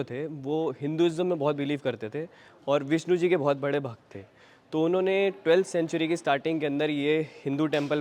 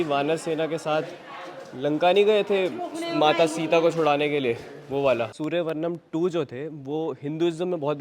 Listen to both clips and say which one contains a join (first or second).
second